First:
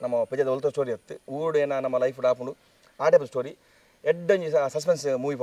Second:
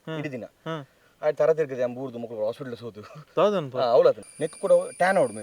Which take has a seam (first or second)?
second